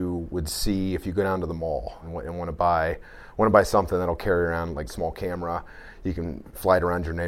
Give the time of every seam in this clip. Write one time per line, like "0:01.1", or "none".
0:02.0
0:04.9